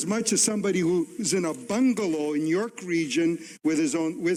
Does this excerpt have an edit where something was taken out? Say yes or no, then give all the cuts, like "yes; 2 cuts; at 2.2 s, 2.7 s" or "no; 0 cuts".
no; 0 cuts